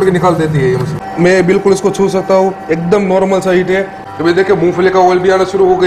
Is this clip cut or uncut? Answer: cut